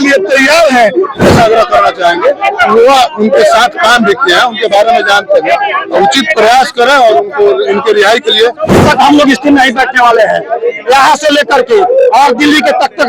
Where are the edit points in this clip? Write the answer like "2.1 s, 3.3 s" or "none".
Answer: 1.2 s, 8.8 s